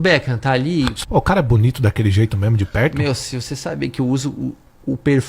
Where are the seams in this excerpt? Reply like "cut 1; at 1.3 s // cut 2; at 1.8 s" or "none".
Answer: cut 1; at 0.9 s